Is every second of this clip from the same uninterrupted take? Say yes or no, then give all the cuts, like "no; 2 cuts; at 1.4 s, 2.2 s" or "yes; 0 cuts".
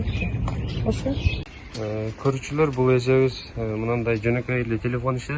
no; 1 cut; at 1.4 s